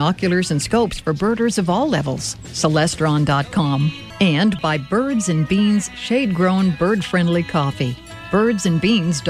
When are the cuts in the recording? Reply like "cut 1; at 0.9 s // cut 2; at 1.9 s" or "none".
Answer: cut 1; at 4.0 s